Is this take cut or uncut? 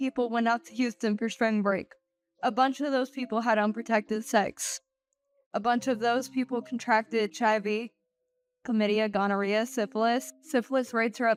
uncut